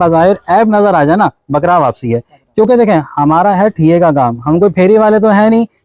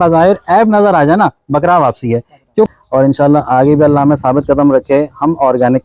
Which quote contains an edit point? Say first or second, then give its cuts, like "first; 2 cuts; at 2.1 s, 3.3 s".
second; 1 cut; at 2.7 s